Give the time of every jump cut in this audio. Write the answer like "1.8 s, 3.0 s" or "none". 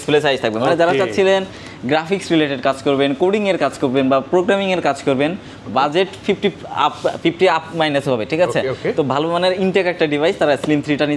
none